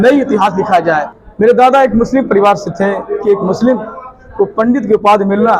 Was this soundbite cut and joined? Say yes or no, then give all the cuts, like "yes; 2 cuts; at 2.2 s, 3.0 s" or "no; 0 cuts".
yes; 2 cuts; at 1.1 s, 3.2 s